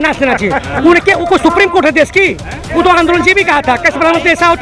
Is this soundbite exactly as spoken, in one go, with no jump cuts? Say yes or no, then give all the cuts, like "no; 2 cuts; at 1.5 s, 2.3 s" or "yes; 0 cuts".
yes; 0 cuts